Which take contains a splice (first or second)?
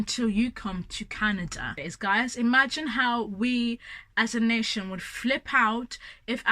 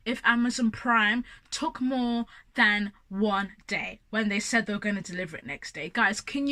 first